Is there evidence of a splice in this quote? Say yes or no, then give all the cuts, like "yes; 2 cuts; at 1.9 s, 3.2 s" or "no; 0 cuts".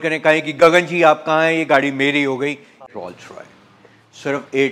yes; 1 cut; at 2.9 s